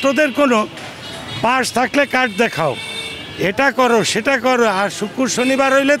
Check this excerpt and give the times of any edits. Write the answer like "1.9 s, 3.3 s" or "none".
none